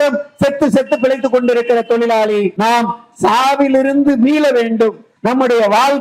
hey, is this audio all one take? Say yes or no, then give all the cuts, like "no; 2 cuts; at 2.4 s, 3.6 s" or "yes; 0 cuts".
no; 2 cuts; at 2.5 s, 5.1 s